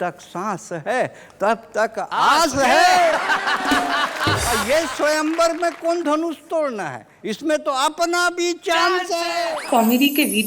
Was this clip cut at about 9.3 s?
yes; 2 cuts; at 4.5 s, 9.3 s

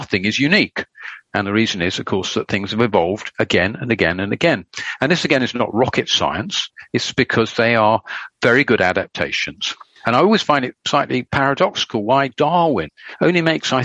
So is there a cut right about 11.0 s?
yes; 1 cut; at 11.0 s

